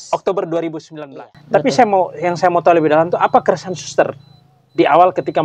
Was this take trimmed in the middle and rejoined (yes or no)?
yes